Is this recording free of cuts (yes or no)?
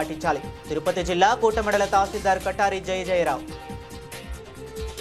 no